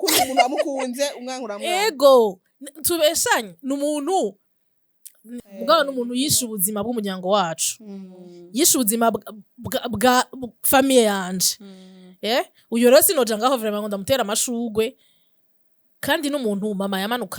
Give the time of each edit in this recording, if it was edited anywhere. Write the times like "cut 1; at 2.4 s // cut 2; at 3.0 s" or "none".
cut 1; at 5.4 s